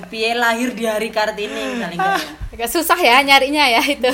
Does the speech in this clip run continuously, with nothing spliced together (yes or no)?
no